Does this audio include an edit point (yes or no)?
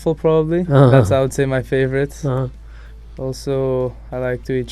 no